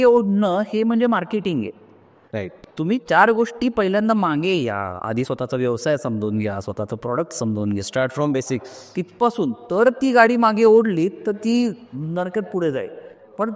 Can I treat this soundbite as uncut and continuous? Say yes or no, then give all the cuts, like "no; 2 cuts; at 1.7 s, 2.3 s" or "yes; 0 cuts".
yes; 0 cuts